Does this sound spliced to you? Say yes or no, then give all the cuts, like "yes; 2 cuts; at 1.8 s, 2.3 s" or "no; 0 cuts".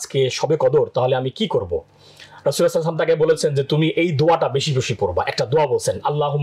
no; 0 cuts